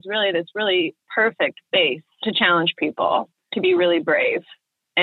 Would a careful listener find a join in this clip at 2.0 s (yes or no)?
yes